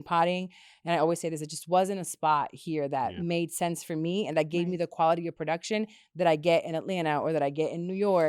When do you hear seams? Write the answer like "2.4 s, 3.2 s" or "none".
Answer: none

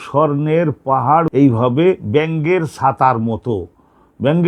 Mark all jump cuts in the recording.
1.3 s

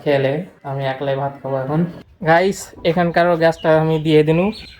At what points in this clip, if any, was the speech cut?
2.1 s

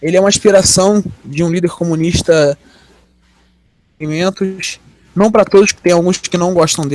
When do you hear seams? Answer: 3.4 s

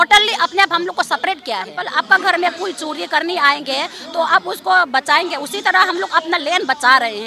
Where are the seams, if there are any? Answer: 1.8 s

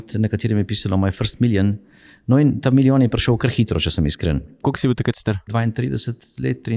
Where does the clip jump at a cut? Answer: 4.6 s, 5.5 s

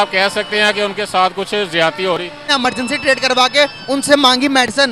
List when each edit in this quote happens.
2.5 s

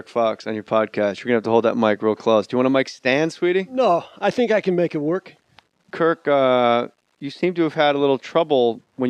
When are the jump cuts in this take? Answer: 3.1 s

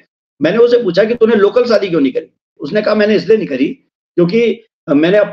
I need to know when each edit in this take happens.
2.5 s

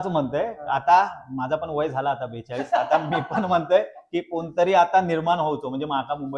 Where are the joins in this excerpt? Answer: none

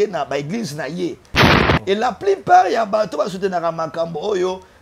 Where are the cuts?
1.4 s

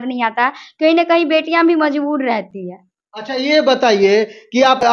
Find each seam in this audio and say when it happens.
none

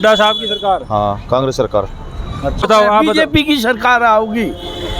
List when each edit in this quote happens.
2.6 s

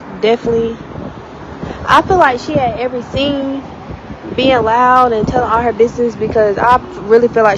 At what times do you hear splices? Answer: none

